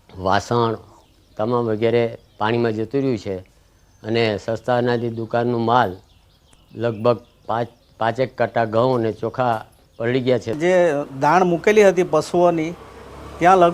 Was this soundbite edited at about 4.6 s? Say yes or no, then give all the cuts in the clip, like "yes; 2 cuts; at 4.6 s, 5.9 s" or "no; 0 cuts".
no; 1 cut; at 7.8 s